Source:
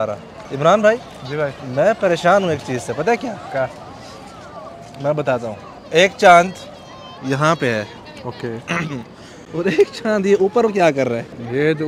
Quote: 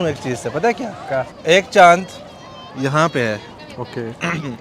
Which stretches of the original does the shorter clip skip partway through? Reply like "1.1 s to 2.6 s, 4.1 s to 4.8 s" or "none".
3.8 s to 5.8 s